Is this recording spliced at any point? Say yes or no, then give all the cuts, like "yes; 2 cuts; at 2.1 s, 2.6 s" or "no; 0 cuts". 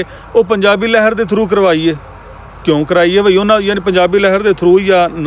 no; 0 cuts